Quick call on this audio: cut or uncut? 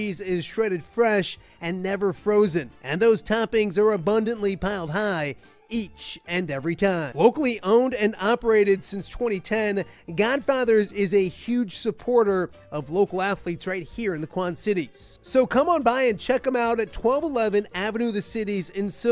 uncut